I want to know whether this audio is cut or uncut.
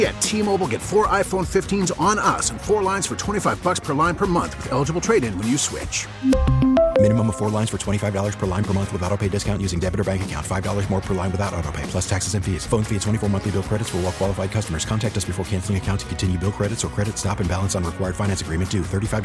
uncut